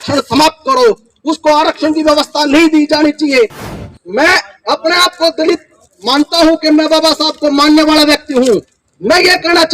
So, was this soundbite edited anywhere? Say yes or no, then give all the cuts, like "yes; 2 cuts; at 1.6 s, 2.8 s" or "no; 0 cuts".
yes; 1 cut; at 3.6 s